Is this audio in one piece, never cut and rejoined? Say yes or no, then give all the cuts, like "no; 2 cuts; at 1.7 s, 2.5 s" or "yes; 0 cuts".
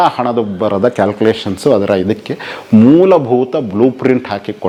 yes; 0 cuts